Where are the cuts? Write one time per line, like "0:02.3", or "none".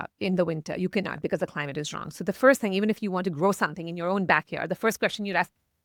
none